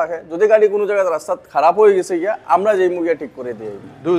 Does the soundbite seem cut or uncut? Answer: uncut